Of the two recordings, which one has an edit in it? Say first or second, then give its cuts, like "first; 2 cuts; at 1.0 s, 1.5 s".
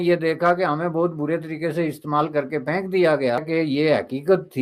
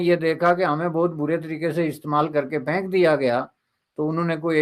first; 1 cut; at 3.4 s